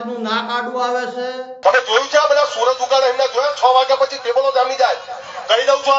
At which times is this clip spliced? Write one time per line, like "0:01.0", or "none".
0:01.5

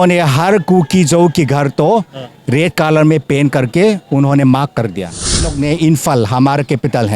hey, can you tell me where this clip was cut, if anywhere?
0:05.5

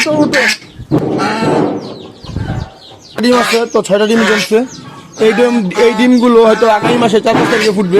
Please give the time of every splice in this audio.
0:01.0
0:03.2

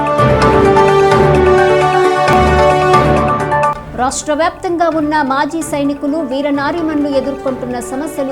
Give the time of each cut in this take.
0:01.0

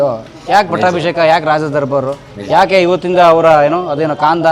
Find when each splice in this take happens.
none

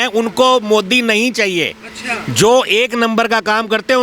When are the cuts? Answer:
none

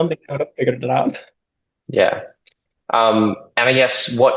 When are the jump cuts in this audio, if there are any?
none

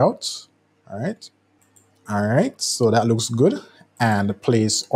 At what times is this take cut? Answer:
none

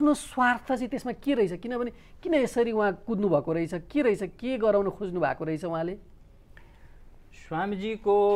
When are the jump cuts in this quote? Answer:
none

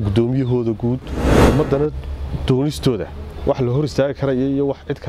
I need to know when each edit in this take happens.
0:01.3

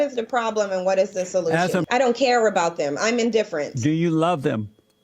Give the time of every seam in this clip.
0:01.9

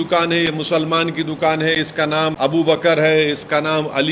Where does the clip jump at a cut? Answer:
0:02.3

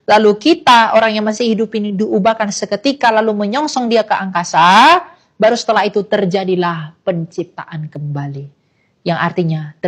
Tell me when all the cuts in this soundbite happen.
none

